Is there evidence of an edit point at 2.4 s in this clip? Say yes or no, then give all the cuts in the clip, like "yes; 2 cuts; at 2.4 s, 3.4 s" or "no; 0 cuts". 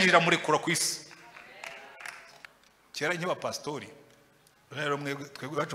yes; 1 cut; at 2.4 s